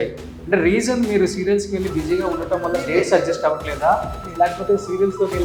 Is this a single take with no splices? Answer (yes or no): yes